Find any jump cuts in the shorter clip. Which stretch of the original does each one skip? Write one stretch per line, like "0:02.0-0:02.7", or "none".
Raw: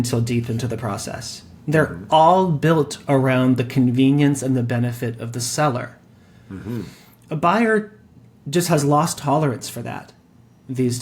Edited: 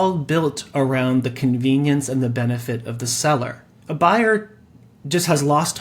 0:06.0-0:07.1

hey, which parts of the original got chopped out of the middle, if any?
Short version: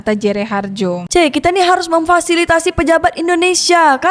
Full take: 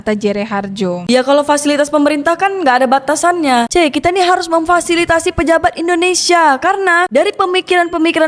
0:01.1-0:03.7

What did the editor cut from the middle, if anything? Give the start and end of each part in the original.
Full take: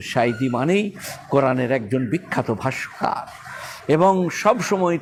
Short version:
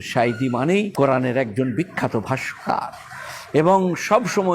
0:00.9-0:01.2

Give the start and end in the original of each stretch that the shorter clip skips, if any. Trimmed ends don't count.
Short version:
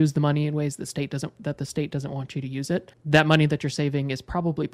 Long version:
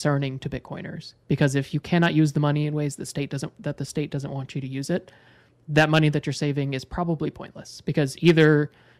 0:05.1-0:05.6

